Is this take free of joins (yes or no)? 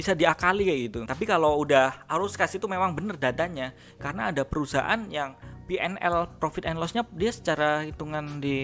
no